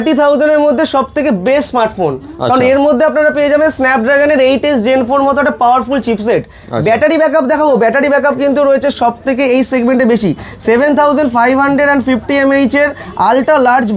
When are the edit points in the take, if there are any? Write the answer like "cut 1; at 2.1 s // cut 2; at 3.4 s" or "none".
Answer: none